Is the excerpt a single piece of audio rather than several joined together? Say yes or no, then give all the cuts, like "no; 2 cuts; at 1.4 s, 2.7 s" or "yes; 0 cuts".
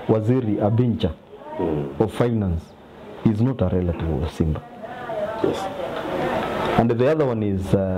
yes; 0 cuts